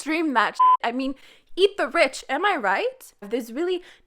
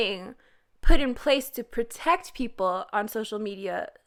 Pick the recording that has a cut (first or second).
first